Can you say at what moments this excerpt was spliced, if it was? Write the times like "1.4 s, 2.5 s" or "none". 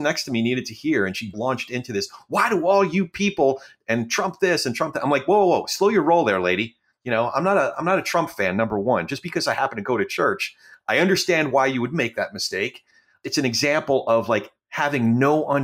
1.4 s